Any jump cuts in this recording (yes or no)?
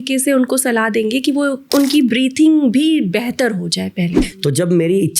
yes